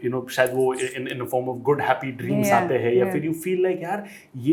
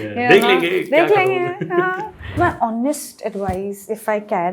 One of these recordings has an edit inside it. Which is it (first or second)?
second